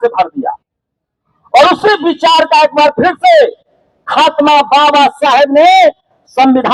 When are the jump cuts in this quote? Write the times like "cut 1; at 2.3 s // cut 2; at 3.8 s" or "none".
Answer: none